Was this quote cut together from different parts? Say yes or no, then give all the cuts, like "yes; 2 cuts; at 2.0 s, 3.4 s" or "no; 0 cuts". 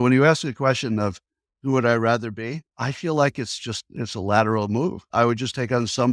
yes; 2 cuts; at 2.7 s, 5.1 s